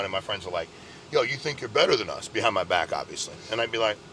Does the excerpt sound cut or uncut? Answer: uncut